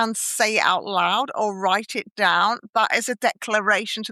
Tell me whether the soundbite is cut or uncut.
uncut